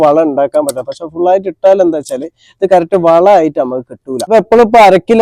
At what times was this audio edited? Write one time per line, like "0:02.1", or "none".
0:04.3